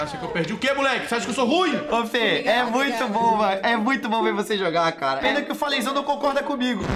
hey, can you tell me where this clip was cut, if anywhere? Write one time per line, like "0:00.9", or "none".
0:01.8